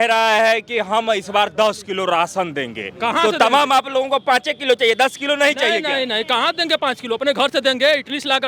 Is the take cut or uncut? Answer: uncut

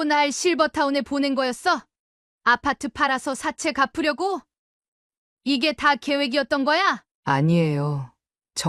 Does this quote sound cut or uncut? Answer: cut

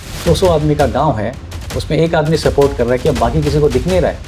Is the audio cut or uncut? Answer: uncut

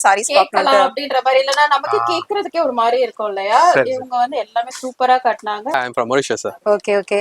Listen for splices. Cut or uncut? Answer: cut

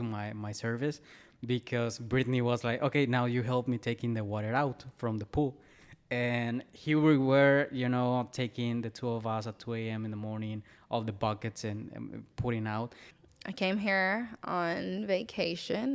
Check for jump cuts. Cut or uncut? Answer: cut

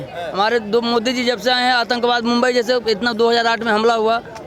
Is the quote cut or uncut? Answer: uncut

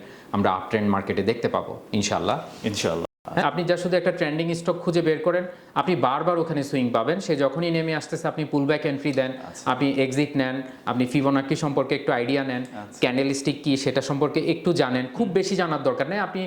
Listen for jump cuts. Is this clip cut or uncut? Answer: cut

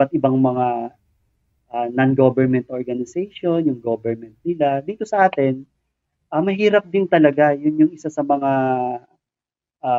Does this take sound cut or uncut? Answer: uncut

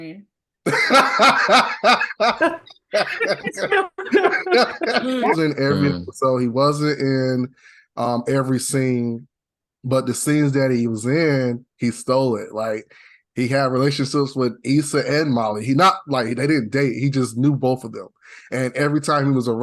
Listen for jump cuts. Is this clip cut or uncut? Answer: cut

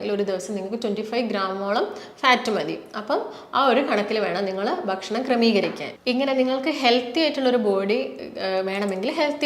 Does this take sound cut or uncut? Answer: uncut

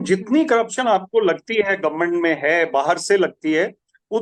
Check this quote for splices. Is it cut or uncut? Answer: uncut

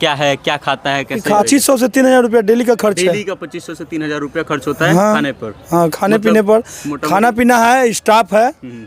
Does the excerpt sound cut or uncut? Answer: cut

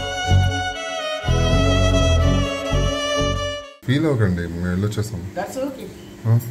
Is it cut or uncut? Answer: uncut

